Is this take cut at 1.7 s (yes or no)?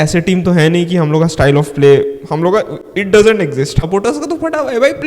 no